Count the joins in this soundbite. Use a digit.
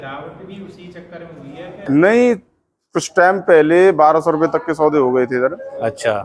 1